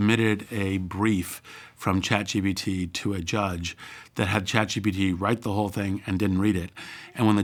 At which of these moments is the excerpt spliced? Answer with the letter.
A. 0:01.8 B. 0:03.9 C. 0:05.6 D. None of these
D